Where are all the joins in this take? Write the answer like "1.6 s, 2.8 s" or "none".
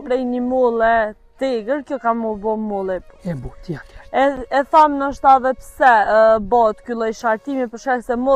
none